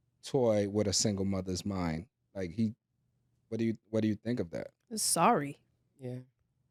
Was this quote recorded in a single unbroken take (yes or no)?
yes